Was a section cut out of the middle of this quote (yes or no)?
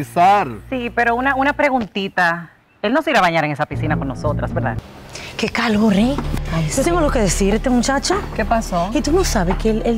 yes